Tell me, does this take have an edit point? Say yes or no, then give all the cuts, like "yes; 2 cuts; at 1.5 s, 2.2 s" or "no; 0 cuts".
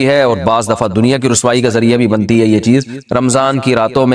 yes; 1 cut; at 3.0 s